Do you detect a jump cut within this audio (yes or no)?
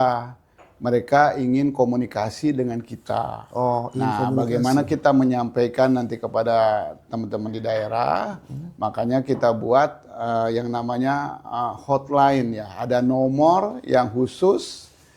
no